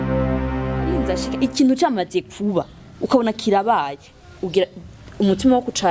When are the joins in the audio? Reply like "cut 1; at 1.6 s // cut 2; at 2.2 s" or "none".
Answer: cut 1; at 1.2 s